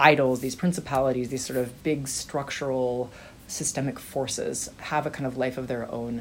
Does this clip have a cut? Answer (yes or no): yes